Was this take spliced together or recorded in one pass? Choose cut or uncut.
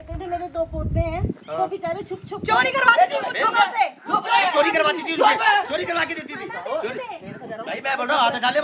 uncut